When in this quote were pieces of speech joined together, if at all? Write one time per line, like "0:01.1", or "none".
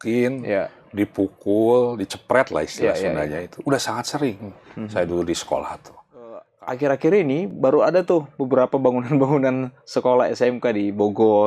0:06.5